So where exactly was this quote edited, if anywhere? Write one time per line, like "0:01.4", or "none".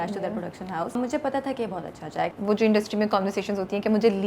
0:01.0
0:02.3